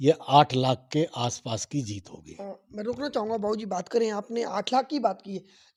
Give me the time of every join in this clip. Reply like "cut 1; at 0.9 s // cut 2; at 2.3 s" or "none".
none